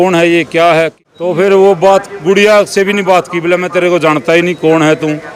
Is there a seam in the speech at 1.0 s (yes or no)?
yes